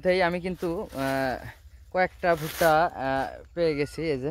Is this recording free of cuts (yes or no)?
yes